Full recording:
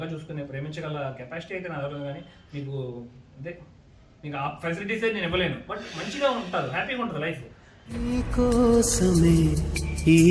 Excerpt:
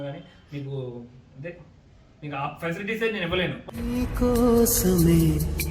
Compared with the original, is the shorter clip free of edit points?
no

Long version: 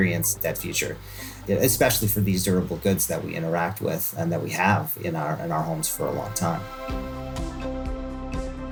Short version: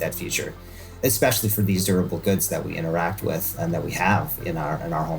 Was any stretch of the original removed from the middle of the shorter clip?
yes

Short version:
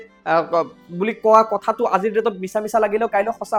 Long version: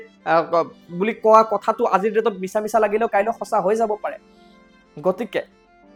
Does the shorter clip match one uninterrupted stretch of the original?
yes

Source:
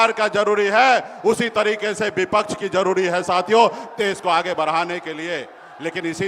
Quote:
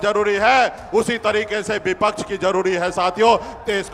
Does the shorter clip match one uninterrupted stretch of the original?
yes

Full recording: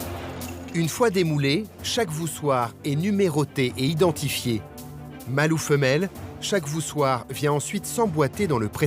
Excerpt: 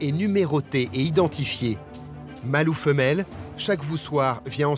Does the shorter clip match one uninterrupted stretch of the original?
yes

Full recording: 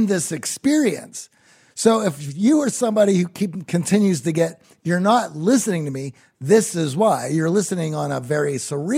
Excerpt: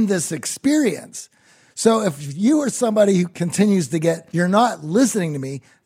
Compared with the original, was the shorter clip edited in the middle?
yes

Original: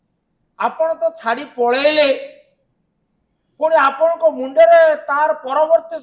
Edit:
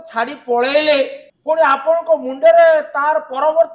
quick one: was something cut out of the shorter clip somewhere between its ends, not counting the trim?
yes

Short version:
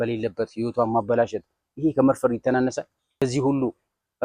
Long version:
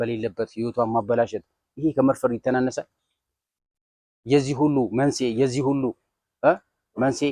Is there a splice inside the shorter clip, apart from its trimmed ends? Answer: yes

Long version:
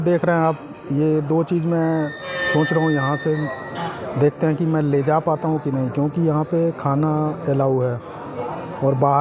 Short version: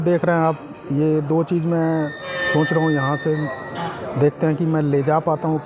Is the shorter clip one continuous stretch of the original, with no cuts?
yes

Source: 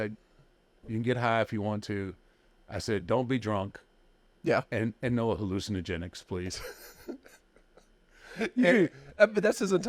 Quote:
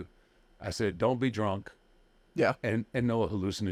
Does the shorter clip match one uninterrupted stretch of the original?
yes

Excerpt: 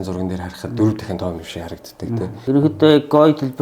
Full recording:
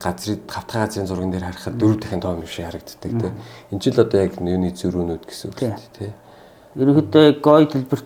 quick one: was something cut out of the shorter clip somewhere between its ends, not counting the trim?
yes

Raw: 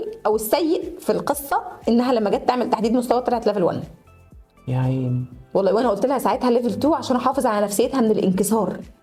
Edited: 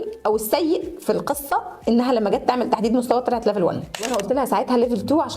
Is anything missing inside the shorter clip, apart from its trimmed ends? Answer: yes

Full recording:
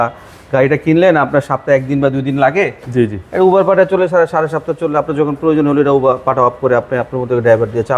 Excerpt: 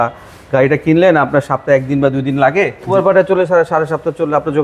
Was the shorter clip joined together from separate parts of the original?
yes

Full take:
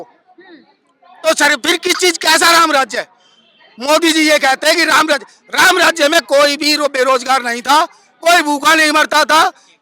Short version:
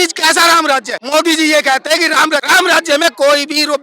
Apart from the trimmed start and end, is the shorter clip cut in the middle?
yes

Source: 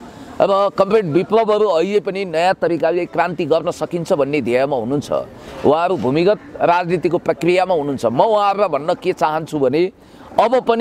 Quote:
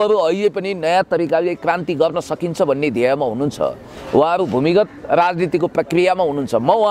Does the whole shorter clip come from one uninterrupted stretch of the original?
yes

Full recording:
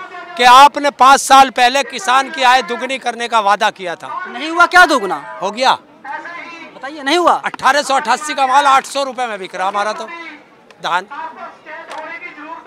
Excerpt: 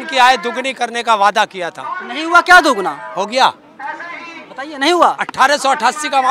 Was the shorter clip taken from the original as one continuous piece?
yes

